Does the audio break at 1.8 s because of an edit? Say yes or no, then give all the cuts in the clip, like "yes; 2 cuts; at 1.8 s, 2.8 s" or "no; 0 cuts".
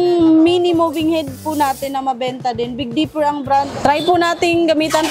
no; 1 cut; at 3.7 s